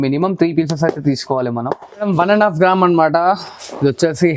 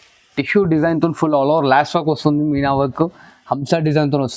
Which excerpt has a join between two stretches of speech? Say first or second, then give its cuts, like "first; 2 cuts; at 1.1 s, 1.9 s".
first; 1 cut; at 1.9 s